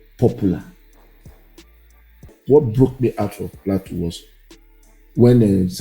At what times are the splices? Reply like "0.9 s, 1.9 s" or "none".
2.4 s